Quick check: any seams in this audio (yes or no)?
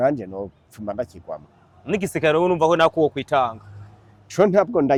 no